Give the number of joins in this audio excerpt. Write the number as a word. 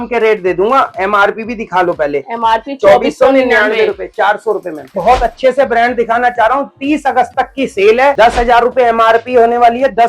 two